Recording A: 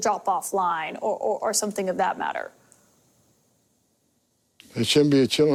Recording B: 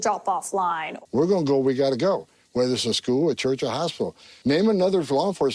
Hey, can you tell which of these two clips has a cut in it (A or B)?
B